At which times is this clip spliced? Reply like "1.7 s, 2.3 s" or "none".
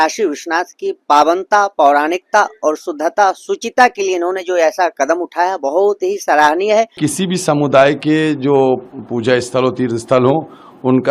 7.0 s